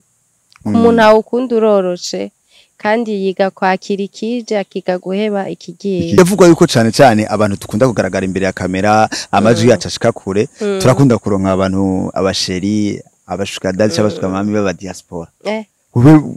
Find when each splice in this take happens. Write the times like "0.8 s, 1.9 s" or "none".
6.2 s